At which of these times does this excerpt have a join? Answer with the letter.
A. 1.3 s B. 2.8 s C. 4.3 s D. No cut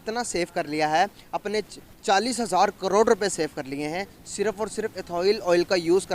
D